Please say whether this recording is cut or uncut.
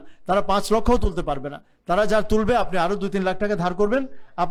uncut